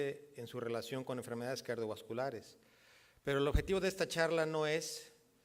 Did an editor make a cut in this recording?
no; 0 cuts

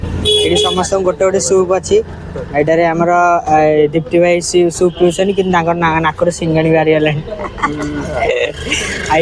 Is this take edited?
yes; 1 cut; at 4.5 s

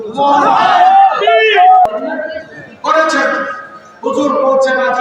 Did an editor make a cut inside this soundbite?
yes; 1 cut; at 1.9 s

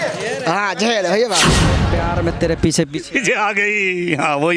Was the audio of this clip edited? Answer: yes; 1 cut; at 1.9 s

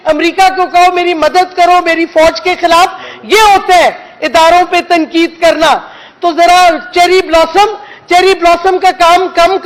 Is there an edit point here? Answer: no; 0 cuts

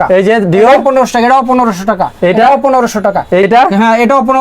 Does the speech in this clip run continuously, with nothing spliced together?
no; 1 cut; at 3.4 s

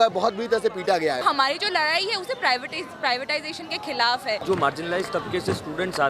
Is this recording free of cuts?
no; 2 cuts; at 1.2 s, 4.4 s

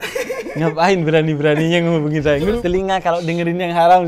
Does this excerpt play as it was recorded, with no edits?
no; 1 cut; at 2.5 s

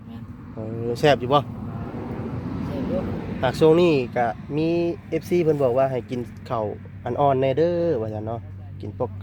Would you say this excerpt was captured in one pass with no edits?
yes; 0 cuts

